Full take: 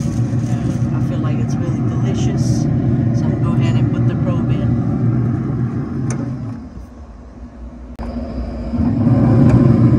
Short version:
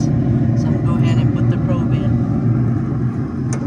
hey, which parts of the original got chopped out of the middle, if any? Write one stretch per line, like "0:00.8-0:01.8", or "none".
none